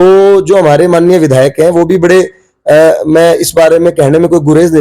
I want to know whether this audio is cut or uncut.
uncut